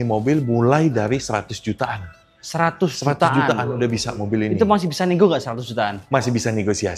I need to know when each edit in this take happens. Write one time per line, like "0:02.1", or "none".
none